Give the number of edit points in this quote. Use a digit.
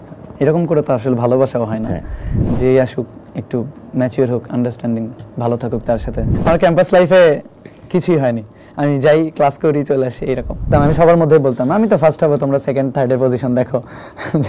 3